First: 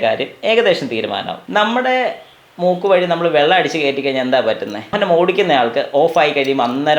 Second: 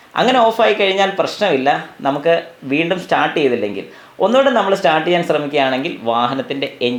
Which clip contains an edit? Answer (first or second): first